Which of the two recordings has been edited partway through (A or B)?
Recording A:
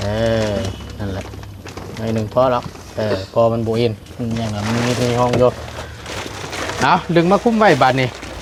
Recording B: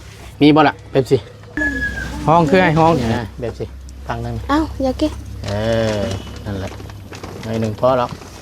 B